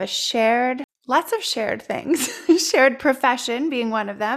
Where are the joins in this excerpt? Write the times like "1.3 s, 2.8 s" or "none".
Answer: 0.9 s